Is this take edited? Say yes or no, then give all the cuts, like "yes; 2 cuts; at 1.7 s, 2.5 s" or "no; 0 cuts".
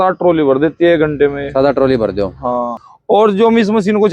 yes; 1 cut; at 2.9 s